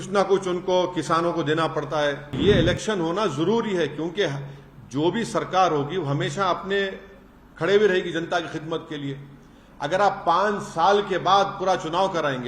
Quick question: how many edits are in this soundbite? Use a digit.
1